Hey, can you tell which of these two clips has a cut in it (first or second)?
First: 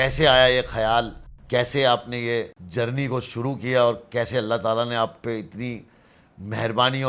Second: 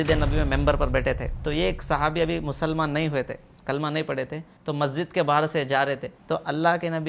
second